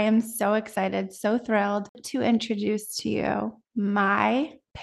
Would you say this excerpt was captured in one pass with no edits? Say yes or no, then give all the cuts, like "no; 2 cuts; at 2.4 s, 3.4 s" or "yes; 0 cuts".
no; 1 cut; at 2.0 s